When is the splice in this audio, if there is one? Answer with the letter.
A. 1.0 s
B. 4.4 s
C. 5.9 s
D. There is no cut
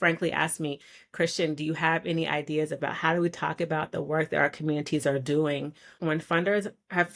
C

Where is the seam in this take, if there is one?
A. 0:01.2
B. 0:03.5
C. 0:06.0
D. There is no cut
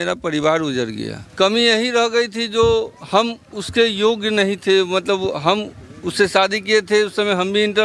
A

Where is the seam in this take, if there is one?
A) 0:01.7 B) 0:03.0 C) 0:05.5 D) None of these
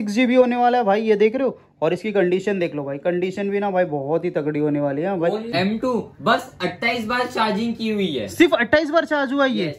C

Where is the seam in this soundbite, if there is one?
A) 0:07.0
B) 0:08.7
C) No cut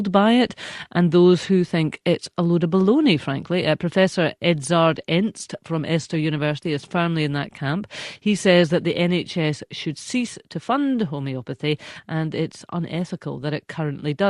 A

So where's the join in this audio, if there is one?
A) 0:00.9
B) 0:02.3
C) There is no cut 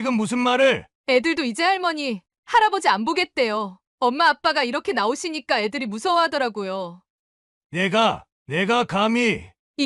A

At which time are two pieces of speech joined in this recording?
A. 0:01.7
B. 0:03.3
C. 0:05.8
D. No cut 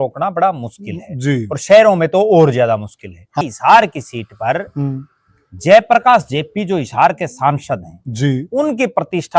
B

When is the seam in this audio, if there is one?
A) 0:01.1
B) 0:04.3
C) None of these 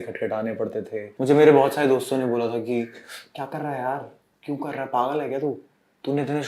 A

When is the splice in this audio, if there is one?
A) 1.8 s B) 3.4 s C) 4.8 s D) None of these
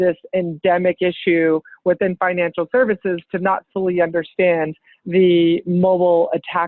D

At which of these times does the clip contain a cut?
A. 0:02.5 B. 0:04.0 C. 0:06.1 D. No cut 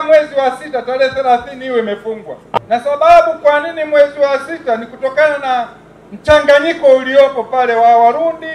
A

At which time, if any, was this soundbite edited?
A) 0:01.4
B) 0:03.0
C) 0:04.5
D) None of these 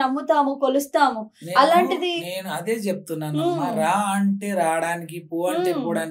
D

